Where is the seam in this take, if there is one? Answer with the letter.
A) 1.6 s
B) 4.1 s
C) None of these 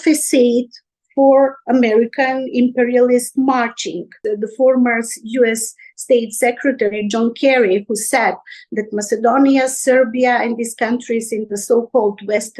B